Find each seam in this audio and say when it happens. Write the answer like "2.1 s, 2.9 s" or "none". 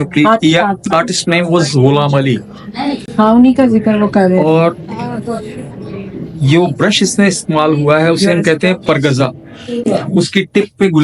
none